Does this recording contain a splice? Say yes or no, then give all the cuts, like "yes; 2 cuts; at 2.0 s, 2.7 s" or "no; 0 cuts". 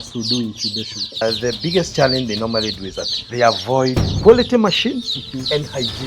yes; 2 cuts; at 1.2 s, 4.1 s